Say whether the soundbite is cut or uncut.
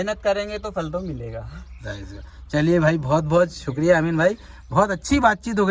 uncut